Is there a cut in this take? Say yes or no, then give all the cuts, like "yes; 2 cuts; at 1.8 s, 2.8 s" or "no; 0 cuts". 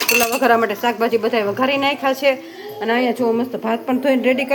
no; 0 cuts